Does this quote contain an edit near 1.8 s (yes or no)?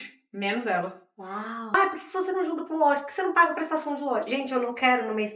yes